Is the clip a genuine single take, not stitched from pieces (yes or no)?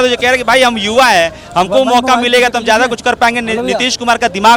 yes